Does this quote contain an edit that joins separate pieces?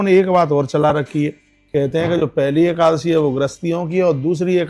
no; 0 cuts

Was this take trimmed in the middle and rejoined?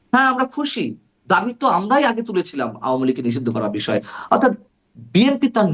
no; 0 cuts

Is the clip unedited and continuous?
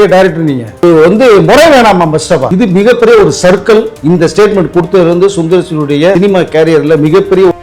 no; 4 cuts; at 0.8 s, 2.5 s, 3.9 s, 6.2 s

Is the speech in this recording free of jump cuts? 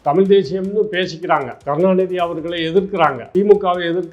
no; 2 cuts; at 1.5 s, 3.2 s

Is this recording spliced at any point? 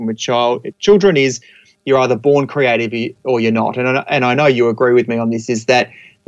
no; 0 cuts

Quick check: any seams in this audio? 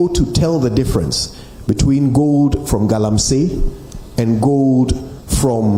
no; 0 cuts

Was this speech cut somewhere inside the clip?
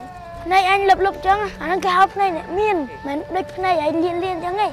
no; 0 cuts

